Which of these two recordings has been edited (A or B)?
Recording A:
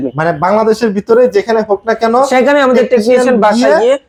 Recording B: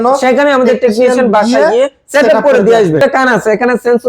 B